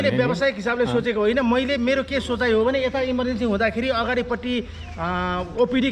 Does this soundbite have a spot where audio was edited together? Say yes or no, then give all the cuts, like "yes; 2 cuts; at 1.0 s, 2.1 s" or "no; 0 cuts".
no; 0 cuts